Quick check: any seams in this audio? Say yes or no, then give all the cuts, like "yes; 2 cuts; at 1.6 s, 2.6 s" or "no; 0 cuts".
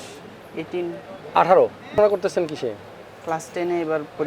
yes; 1 cut; at 1.9 s